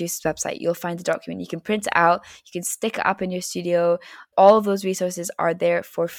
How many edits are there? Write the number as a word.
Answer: zero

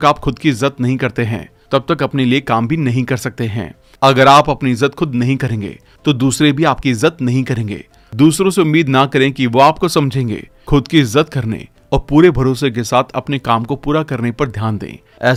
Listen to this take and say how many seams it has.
zero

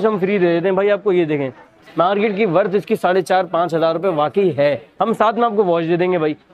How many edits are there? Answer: two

